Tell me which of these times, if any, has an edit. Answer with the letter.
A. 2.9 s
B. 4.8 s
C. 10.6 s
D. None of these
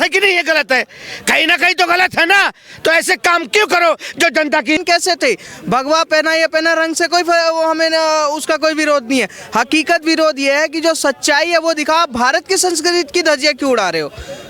B